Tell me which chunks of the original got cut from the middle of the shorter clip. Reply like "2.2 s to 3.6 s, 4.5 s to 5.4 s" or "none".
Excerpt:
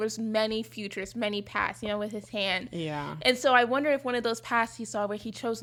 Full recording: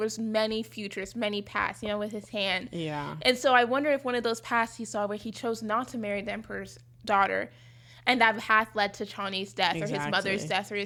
none